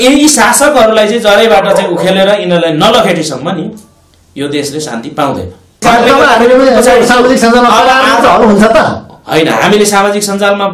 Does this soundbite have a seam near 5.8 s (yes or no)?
yes